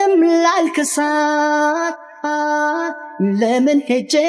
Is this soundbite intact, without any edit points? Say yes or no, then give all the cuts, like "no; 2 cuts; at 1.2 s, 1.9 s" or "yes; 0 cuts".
yes; 0 cuts